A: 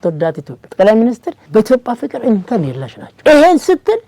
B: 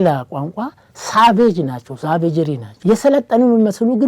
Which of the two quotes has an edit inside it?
B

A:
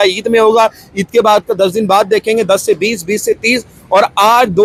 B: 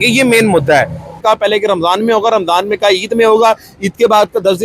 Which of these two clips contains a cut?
B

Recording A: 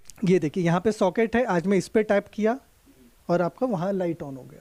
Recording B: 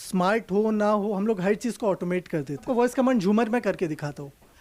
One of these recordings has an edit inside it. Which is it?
B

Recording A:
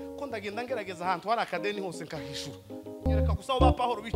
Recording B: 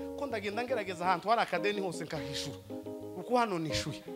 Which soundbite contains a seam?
A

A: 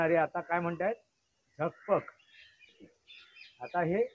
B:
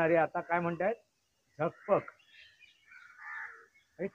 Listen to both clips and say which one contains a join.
A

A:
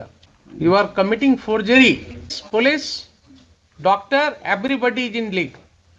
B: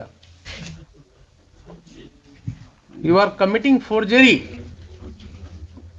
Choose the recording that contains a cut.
A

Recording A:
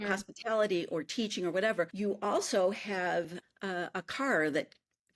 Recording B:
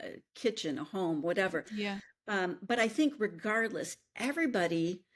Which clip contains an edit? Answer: A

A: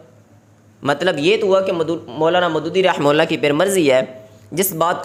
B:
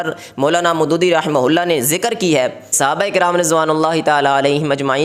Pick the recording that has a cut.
B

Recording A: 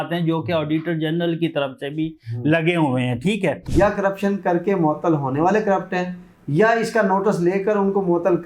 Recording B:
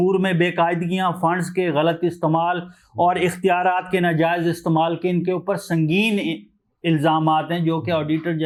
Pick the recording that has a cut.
A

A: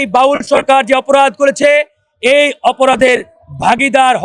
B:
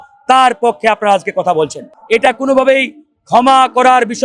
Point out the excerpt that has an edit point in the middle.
B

